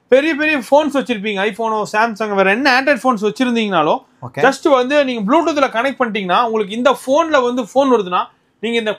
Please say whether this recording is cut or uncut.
uncut